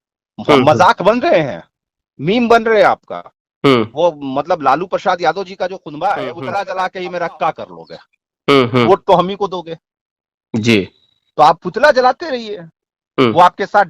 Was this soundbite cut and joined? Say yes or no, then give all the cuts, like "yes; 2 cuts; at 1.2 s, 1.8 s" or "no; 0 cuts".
yes; 1 cut; at 6.4 s